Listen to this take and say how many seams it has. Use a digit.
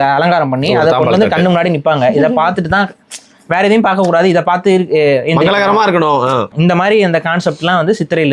1